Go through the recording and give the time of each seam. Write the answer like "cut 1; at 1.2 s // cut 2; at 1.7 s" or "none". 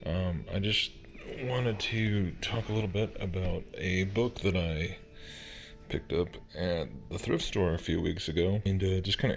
none